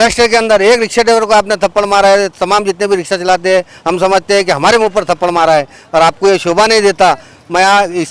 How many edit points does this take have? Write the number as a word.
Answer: zero